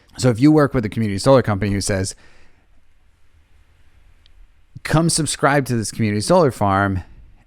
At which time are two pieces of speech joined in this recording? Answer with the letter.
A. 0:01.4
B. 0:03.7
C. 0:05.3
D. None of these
D